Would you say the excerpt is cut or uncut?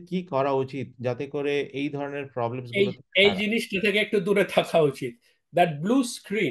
uncut